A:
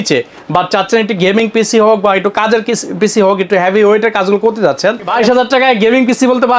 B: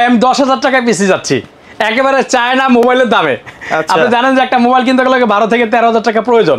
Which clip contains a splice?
A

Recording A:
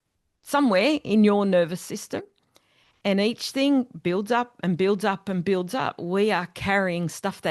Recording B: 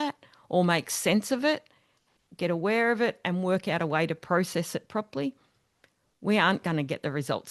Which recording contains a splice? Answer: A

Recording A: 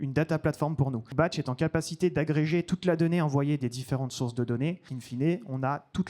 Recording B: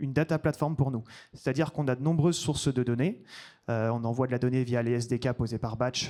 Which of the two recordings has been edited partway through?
A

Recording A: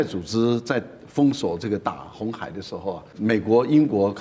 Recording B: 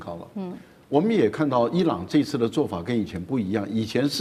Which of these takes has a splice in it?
A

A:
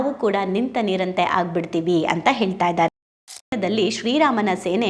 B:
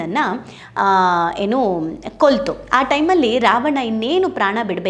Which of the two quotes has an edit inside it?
A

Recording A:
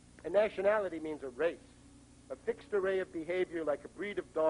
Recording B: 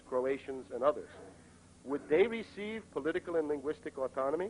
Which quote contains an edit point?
B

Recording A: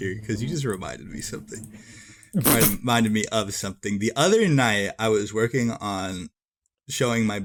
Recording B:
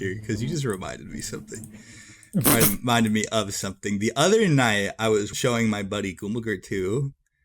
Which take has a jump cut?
B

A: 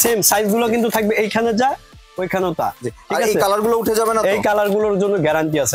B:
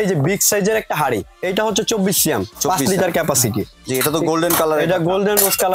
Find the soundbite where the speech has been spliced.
B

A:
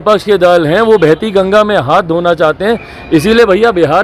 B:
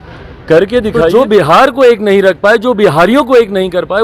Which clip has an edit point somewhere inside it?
B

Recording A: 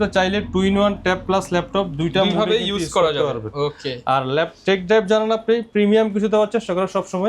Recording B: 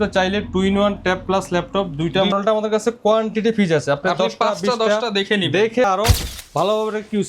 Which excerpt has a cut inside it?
B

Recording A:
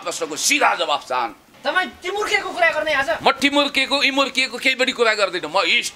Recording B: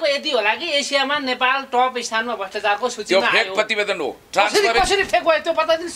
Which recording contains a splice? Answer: A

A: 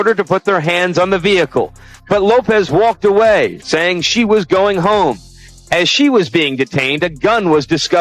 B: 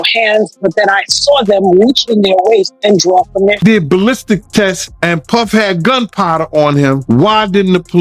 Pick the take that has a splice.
B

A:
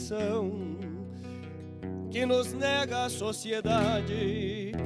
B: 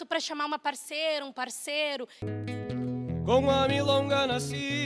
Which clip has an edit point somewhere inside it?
B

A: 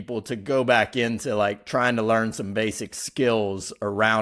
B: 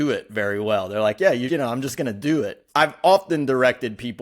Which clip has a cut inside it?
B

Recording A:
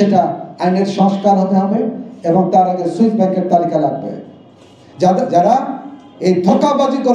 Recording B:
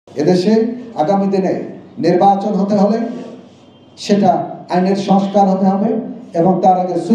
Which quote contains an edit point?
A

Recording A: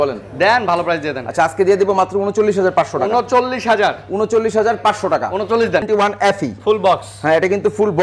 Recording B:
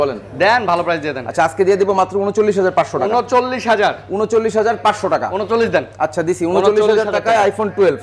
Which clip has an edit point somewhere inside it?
A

